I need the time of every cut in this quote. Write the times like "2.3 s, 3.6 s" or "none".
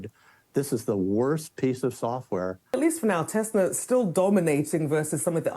2.7 s

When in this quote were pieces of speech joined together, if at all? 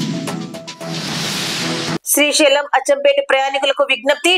none

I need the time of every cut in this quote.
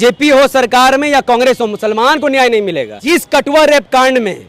2.9 s

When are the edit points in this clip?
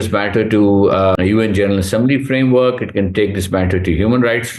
1.2 s

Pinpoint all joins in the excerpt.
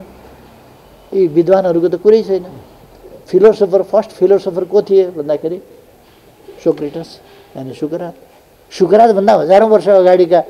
none

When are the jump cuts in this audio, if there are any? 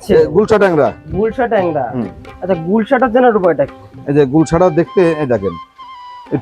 2.2 s

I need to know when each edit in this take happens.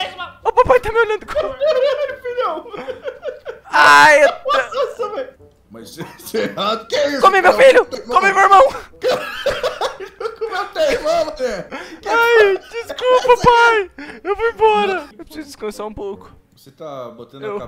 5.3 s, 15.1 s

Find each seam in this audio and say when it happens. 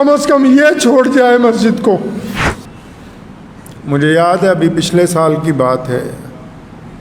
2.6 s

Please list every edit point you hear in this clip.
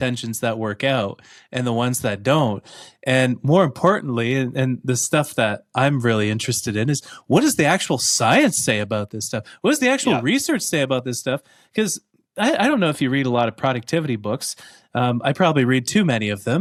none

